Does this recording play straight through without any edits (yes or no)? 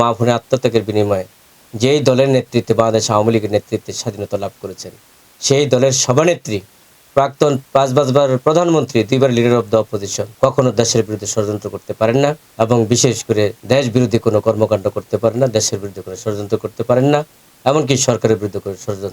no